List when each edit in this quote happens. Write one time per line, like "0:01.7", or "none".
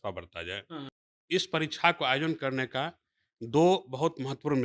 0:00.9